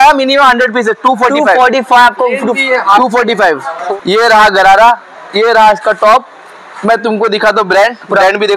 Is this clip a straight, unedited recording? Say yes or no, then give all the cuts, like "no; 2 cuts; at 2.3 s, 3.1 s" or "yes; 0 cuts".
no; 1 cut; at 3.8 s